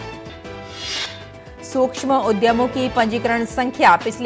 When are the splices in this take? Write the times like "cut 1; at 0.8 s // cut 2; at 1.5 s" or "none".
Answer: cut 1; at 1.3 s